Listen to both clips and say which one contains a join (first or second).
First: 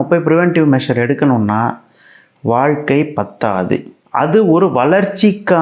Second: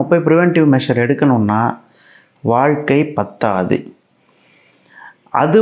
first